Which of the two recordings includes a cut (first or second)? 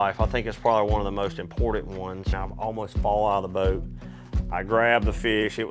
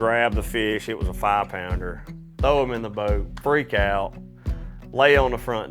first